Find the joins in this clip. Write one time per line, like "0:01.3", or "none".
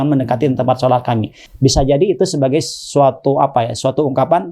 none